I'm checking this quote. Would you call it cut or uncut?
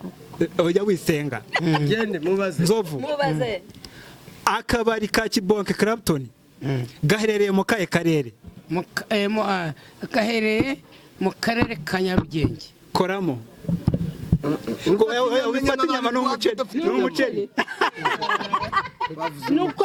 uncut